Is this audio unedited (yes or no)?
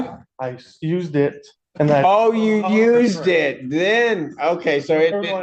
yes